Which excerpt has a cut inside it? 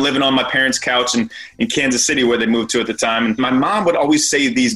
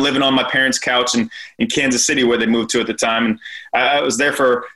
first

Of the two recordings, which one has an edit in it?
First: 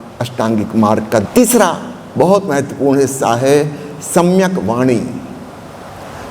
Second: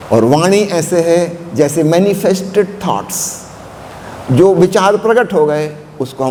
first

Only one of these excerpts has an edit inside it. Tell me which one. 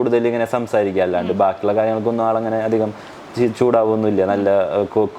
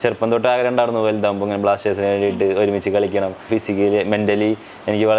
second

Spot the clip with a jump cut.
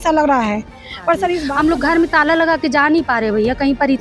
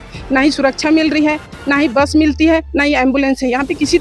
first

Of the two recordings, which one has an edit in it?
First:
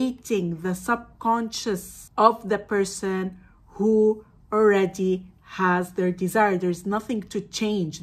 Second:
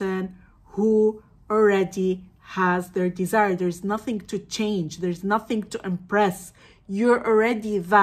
first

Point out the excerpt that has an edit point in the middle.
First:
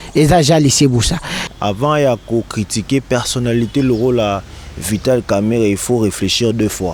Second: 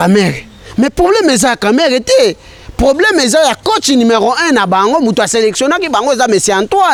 first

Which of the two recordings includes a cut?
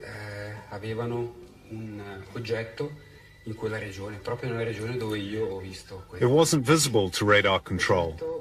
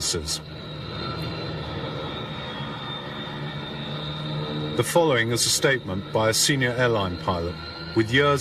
second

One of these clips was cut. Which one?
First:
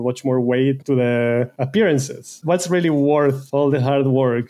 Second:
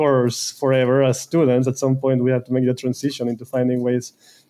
first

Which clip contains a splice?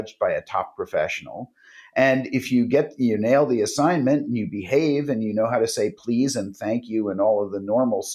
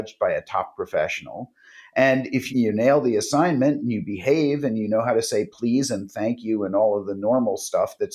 second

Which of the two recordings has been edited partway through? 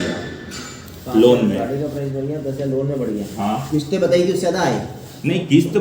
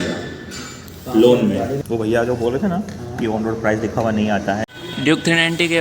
second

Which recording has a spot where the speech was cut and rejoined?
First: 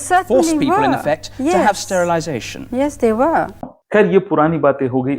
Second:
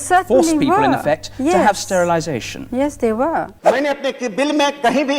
second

